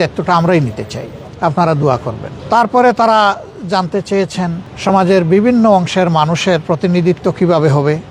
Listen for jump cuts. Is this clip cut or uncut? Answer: uncut